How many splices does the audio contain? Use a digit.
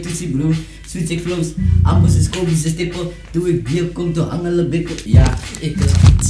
1